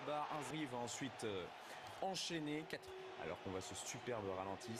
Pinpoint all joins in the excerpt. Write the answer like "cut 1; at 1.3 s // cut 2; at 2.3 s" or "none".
none